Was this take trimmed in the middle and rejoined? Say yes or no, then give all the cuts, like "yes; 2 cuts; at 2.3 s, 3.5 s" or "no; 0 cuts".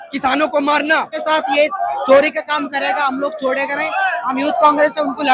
yes; 1 cut; at 1.2 s